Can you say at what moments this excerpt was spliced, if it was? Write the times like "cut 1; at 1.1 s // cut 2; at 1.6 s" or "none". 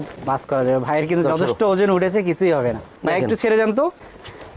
cut 1; at 3.0 s

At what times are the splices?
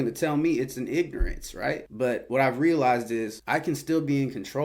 cut 1; at 1.9 s // cut 2; at 3.4 s

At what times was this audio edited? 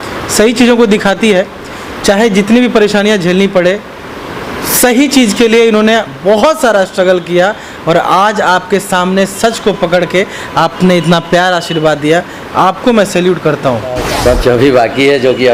cut 1; at 14.0 s

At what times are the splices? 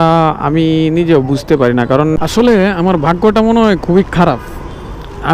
cut 1; at 2.2 s

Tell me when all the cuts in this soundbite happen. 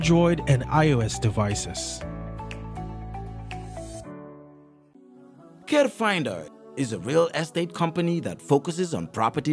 cut 1; at 4.9 s

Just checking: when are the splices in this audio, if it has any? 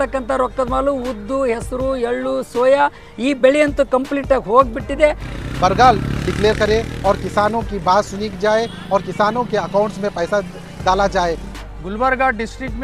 cut 1; at 5.3 s // cut 2; at 11.5 s

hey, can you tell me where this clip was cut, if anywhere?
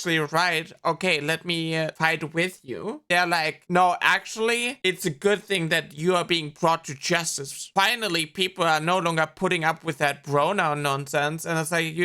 cut 1; at 1.9 s // cut 2; at 3.6 s

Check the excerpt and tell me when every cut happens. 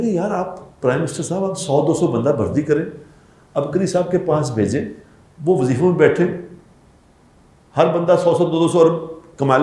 none

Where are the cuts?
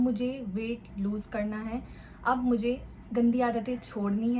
none

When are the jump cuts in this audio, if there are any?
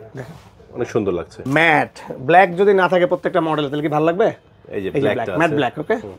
cut 1; at 1.4 s

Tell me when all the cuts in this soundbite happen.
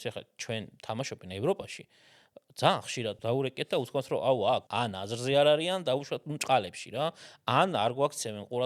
cut 1; at 3.2 s // cut 2; at 4.7 s

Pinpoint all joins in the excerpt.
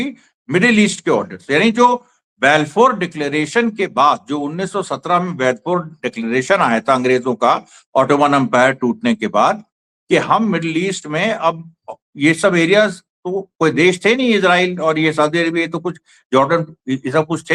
none

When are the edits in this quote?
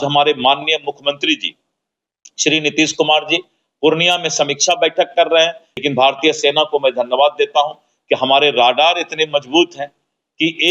cut 1; at 5.7 s

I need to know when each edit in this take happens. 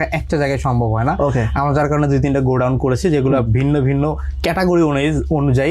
none

